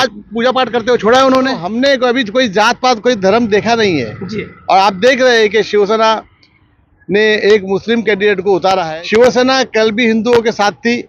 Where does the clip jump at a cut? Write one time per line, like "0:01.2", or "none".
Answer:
0:01.7
0:08.8